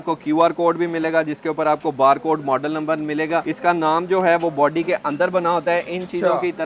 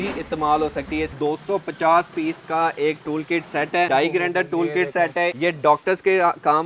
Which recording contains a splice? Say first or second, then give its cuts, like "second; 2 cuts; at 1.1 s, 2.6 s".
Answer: second; 3 cuts; at 1.1 s, 3.9 s, 5.3 s